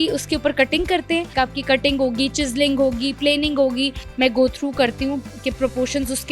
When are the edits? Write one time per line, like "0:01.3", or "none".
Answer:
0:01.3
0:04.0